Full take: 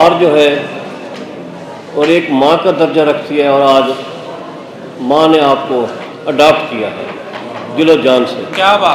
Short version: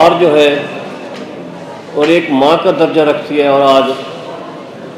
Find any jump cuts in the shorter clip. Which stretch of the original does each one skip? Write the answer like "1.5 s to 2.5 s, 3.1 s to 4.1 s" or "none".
none